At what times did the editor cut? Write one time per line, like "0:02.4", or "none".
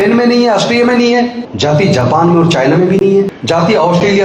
0:01.4
0:03.4